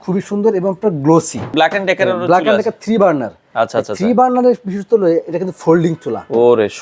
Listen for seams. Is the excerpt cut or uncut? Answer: cut